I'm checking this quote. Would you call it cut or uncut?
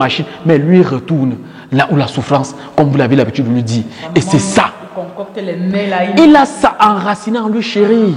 uncut